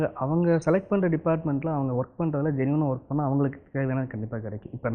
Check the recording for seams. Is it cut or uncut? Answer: uncut